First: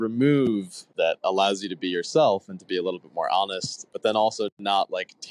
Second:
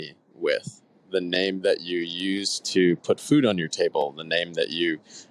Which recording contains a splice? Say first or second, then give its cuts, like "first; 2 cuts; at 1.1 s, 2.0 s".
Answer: first; 2 cuts; at 0.9 s, 3.9 s